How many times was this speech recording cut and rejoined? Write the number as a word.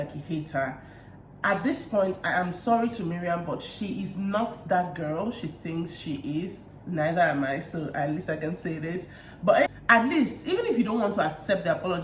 one